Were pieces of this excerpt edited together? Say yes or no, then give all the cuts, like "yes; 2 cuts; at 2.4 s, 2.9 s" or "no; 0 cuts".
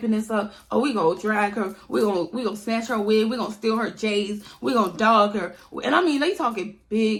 no; 0 cuts